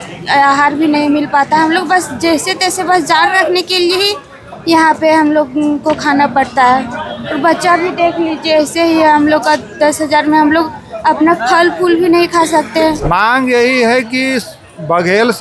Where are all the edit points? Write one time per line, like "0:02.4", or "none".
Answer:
0:13.0